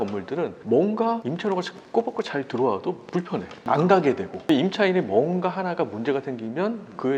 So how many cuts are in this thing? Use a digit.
1